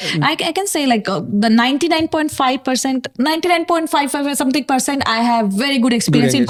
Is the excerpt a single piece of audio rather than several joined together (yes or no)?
yes